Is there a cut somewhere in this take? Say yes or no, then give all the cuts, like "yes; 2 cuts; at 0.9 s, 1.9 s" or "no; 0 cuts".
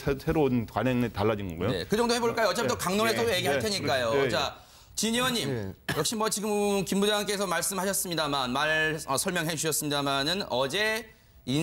yes; 1 cut; at 7.3 s